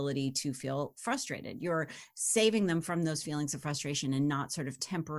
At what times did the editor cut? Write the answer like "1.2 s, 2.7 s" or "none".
none